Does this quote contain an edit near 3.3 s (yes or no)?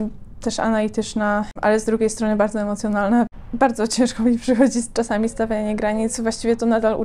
yes